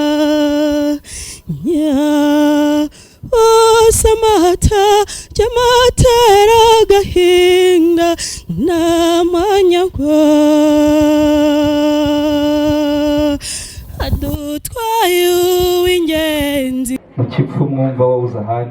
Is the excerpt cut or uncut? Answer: cut